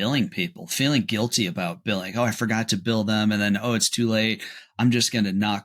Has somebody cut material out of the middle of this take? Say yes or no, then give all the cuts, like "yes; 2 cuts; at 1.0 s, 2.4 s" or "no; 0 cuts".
no; 0 cuts